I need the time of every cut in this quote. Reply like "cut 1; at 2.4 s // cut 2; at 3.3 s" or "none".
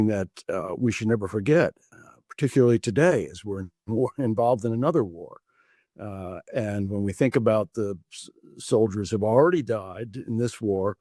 none